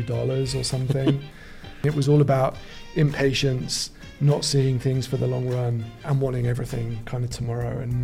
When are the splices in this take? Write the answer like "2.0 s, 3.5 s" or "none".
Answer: 1.8 s, 6.0 s